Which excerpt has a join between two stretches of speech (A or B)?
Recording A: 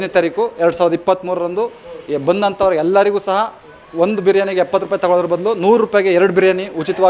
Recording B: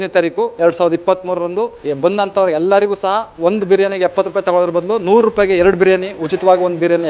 B